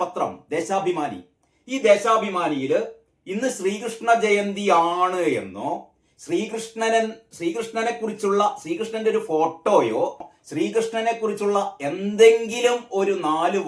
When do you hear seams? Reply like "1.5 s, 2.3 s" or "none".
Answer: 10.3 s

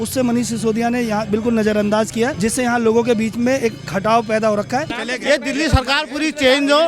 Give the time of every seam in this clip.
2.3 s, 5.0 s

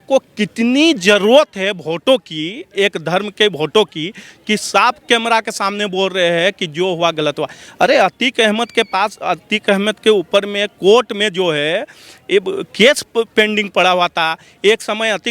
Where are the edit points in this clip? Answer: none

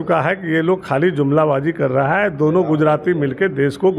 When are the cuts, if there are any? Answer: none

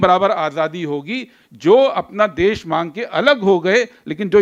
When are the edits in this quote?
none

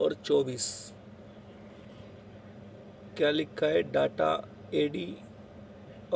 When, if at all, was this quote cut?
none

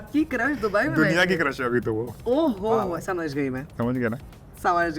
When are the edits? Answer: 2.1 s

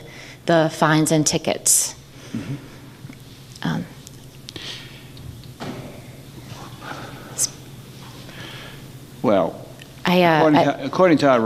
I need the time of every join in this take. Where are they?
none

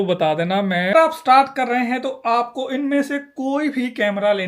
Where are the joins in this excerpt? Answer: 0.9 s

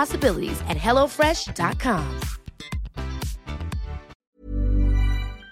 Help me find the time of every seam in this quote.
4.1 s

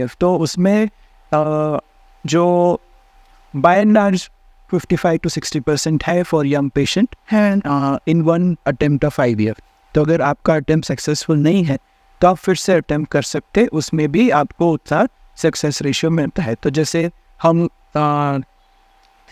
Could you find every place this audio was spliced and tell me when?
none

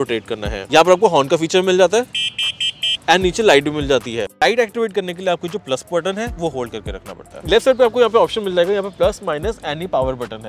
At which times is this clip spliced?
none

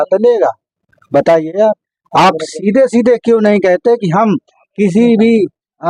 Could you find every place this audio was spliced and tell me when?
none

